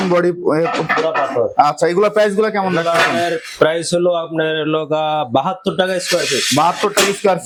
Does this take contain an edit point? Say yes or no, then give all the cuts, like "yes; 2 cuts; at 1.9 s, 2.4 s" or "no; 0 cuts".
no; 0 cuts